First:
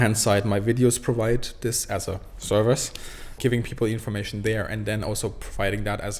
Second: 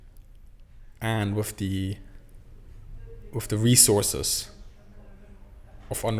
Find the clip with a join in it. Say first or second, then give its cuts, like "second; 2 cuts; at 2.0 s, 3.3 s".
first; 1 cut; at 3.4 s